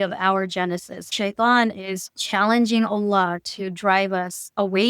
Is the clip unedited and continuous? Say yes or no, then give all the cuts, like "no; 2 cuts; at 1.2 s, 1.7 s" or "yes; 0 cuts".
no; 1 cut; at 1.1 s